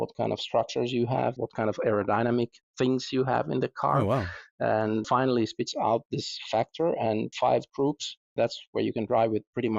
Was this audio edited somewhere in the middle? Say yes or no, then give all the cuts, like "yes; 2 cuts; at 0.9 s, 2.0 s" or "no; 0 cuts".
yes; 3 cuts; at 1.4 s, 5.1 s, 7.3 s